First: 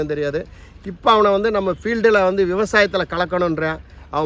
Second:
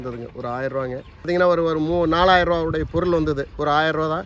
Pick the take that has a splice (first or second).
second